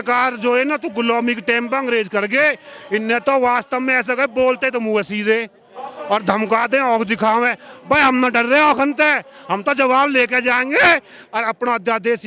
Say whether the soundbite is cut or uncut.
uncut